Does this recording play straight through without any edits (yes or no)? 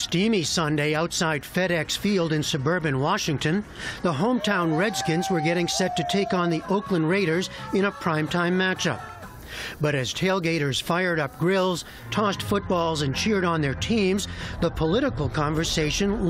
yes